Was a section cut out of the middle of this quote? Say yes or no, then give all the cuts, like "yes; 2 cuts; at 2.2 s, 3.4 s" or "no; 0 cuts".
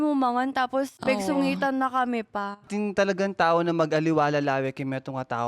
yes; 2 cuts; at 0.9 s, 2.7 s